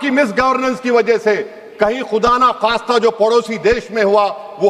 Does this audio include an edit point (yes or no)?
no